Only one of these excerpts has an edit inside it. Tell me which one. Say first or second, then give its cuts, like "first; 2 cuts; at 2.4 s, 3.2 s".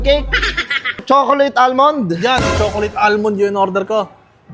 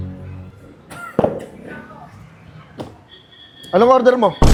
first; 1 cut; at 1.0 s